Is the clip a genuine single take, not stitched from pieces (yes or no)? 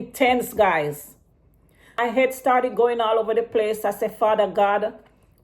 no